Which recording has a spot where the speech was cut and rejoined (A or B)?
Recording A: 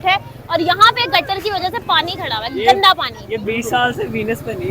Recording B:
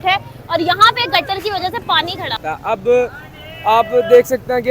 B